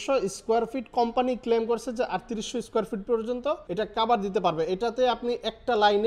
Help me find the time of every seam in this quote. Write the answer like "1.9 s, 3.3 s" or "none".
3.6 s